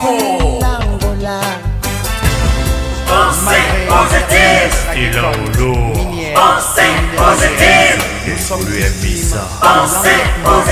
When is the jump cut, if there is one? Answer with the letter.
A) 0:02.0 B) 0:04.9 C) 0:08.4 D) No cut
D